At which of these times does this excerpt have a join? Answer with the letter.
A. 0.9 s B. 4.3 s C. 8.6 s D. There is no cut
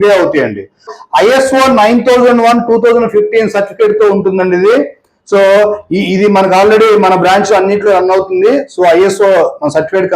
A